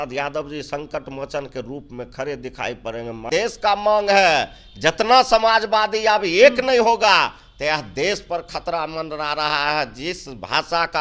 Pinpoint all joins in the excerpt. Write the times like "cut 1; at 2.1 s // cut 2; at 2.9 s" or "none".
cut 1; at 3.3 s